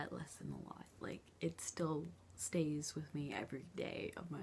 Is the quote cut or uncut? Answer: uncut